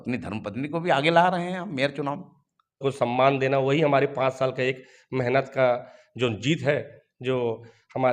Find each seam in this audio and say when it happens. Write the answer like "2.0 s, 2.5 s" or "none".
2.8 s